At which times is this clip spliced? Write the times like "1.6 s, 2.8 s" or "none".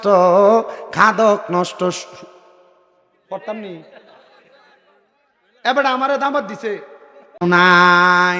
7.3 s

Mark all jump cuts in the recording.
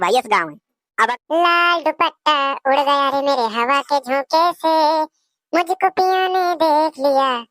1.1 s

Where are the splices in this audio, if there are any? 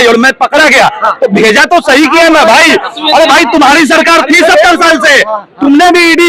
none

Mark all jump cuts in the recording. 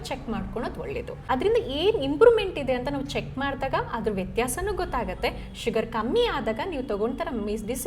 1.1 s

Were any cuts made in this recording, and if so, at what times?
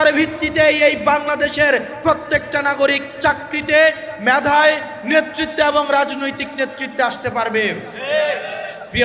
none

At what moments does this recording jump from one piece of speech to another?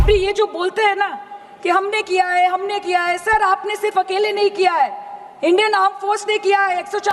none

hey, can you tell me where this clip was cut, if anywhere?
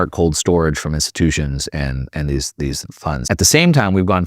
3.2 s

